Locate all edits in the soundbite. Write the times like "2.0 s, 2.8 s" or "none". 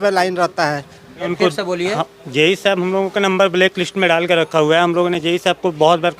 1.2 s

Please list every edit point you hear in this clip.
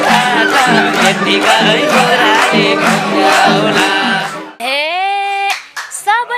4.6 s

